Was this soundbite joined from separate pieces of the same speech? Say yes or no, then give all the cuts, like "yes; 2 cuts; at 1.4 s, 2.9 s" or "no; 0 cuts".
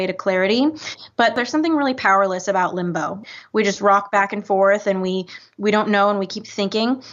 yes; 2 cuts; at 1.4 s, 3.2 s